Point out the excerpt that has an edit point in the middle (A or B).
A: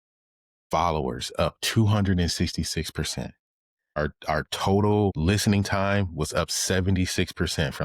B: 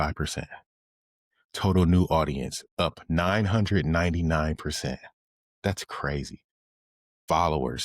A